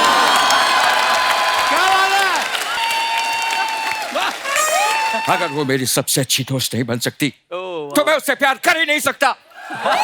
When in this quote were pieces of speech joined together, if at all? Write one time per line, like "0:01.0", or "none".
0:02.8
0:05.2

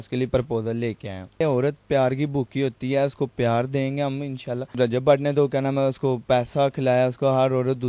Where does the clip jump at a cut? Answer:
0:01.4
0:04.7

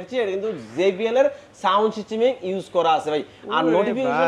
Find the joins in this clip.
none

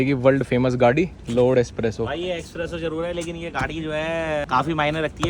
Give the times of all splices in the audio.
0:01.2
0:04.5

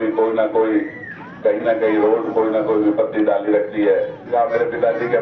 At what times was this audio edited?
0:04.2

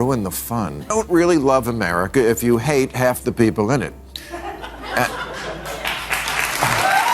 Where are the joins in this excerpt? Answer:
0:00.9

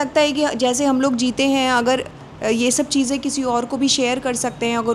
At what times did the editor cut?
none

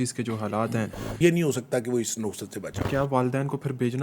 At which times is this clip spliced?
0:01.0
0:02.8

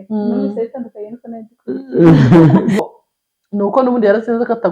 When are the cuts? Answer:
0:02.8

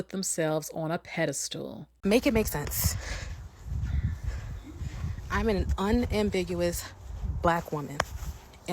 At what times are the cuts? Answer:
0:01.8

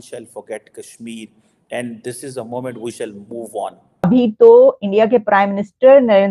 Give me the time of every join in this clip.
0:04.1

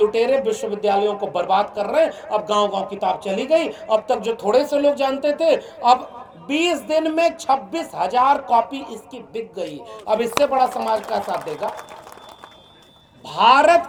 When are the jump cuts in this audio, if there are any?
none

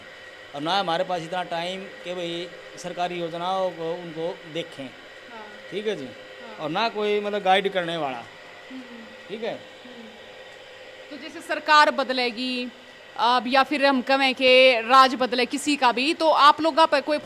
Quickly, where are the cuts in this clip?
none

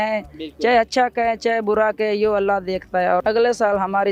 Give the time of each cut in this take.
0:03.2

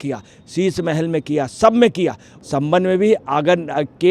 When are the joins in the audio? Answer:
0:02.3

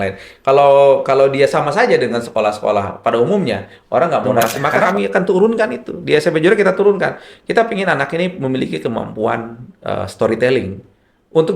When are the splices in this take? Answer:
0:04.6

